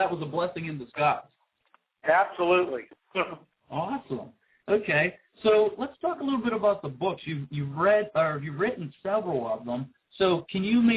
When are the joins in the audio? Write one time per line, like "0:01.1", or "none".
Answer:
0:03.2